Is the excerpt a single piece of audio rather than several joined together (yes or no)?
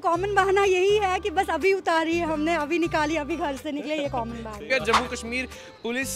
no